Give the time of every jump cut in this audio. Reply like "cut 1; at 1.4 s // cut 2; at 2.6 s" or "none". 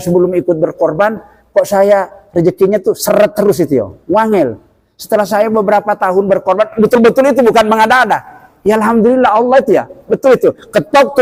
none